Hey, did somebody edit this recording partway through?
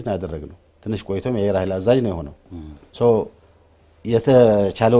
no; 0 cuts

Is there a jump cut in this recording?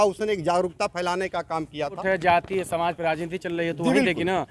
yes; 1 cut; at 2.0 s

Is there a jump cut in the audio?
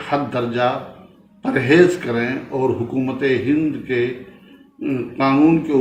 no; 0 cuts

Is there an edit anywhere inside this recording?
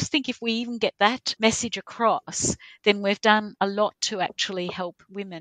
yes; 1 cut; at 1.3 s

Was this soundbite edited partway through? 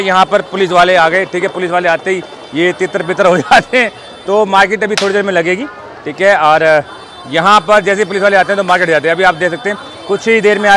no; 0 cuts

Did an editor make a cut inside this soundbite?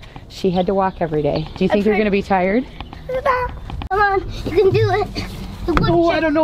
yes; 1 cut; at 3.9 s

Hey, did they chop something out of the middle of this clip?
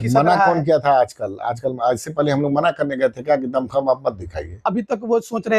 yes; 1 cut; at 4.6 s

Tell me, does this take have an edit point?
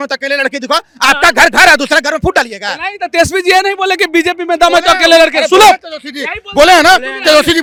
no; 0 cuts

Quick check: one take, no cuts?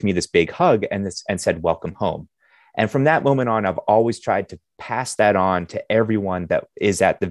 yes; 0 cuts

